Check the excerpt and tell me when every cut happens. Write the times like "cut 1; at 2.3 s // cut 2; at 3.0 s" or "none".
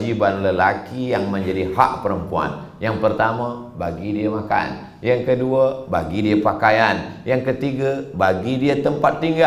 none

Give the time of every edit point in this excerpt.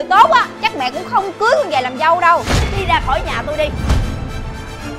cut 1; at 2.6 s

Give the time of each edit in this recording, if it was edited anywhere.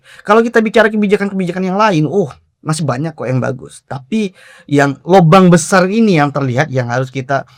none

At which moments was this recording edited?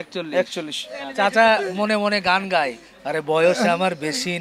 cut 1; at 1.0 s

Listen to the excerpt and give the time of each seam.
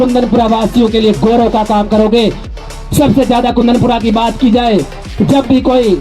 cut 1; at 2.4 s

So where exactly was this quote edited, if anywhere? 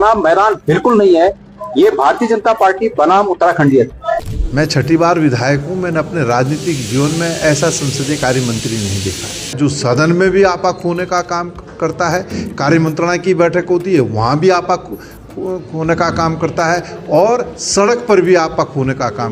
cut 1; at 4.0 s // cut 2; at 9.6 s

